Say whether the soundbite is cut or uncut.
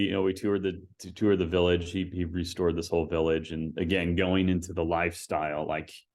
uncut